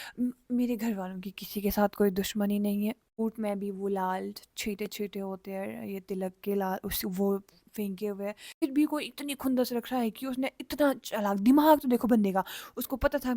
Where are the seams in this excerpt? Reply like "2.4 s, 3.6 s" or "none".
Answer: 3.0 s, 8.6 s